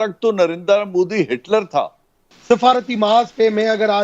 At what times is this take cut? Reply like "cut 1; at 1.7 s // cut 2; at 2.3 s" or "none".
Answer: cut 1; at 2.3 s